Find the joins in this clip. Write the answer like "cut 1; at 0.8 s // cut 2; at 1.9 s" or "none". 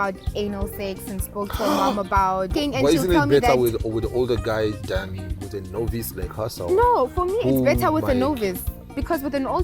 cut 1; at 2.5 s